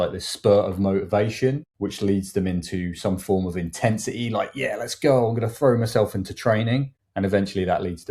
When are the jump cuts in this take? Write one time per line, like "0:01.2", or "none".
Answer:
0:01.7
0:07.0